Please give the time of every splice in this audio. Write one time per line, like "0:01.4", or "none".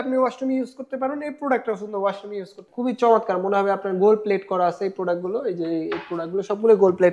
0:02.7